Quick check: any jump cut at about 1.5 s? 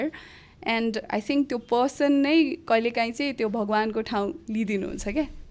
no; 0 cuts

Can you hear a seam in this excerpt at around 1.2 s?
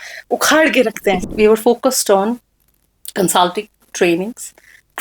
yes; 1 cut; at 1.2 s

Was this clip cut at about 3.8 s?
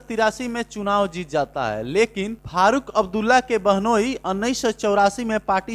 no; 1 cut; at 2.4 s

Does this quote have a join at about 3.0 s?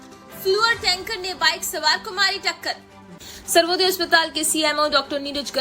yes; 1 cut; at 3.0 s

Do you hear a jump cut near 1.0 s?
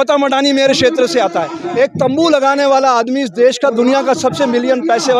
no; 0 cuts

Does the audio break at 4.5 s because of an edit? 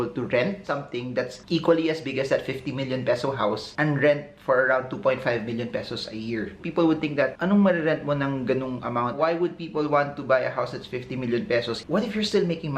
no; 2 cuts; at 9.2 s, 11.8 s

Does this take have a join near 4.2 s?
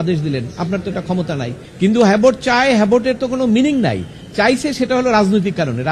no; 1 cut; at 1.6 s

